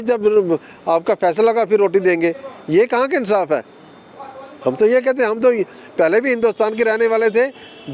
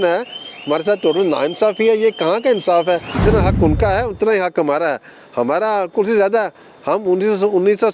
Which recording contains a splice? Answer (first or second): second